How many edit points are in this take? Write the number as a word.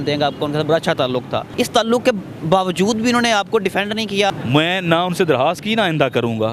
two